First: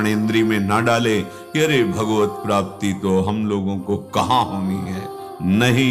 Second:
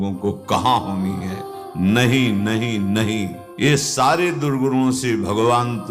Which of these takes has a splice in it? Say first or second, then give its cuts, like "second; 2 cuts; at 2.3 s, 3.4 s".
second; 1 cut; at 3.6 s